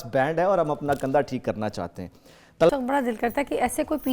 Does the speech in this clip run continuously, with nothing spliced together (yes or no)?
no